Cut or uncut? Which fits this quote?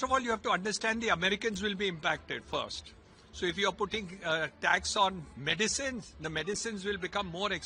uncut